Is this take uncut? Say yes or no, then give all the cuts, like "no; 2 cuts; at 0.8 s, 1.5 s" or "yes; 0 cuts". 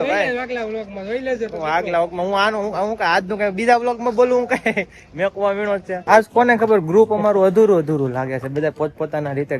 no; 1 cut; at 6.0 s